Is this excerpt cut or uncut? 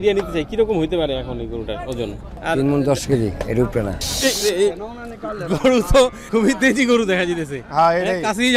cut